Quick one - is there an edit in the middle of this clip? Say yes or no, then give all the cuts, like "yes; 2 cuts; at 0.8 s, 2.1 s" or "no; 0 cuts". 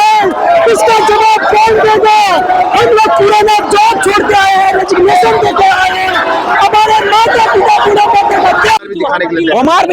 yes; 1 cut; at 8.8 s